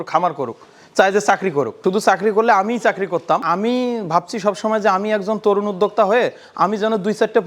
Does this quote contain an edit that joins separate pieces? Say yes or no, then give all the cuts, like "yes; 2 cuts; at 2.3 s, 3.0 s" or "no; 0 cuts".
yes; 2 cuts; at 1.8 s, 3.4 s